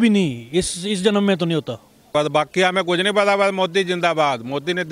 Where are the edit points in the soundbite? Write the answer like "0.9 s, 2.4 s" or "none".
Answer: 2.1 s